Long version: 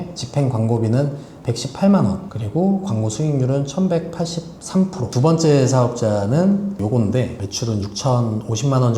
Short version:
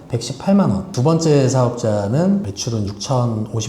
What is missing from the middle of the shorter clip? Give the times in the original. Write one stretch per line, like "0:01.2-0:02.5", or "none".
0:02.3-0:05.1
0:06.6-0:07.4

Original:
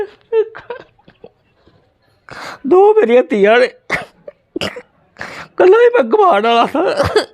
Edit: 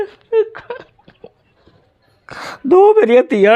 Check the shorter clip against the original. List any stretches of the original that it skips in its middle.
none

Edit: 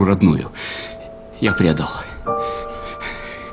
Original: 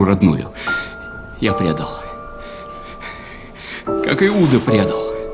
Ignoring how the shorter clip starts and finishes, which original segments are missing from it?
none

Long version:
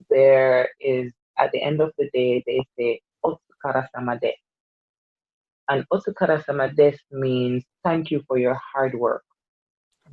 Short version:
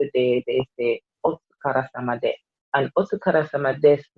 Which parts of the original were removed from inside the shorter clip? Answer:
0:04.5-0:05.5

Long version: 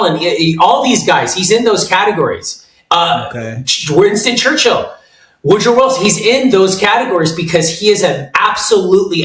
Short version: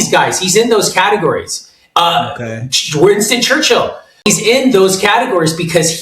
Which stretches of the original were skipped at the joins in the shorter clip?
0:05.2-0:06.0

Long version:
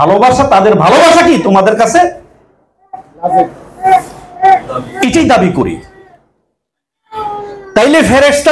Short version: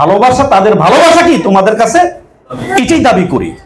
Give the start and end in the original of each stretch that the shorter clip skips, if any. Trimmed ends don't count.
0:02.5-0:04.8

